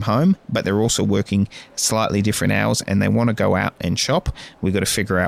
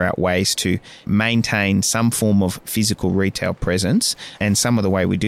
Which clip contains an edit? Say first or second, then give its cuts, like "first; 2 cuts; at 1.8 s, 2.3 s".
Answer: second; 2 cuts; at 1.0 s, 4.3 s